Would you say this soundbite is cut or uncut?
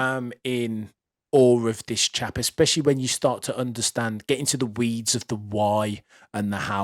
uncut